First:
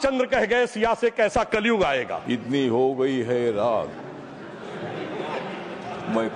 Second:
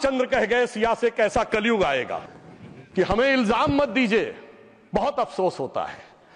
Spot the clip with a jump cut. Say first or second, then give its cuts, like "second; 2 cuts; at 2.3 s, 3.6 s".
first; 1 cut; at 2.2 s